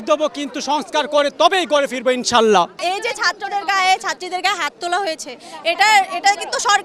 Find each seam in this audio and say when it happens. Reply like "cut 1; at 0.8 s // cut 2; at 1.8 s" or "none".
none